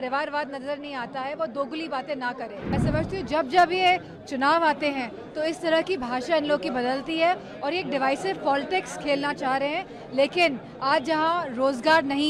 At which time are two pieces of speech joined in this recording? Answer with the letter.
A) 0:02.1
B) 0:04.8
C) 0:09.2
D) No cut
A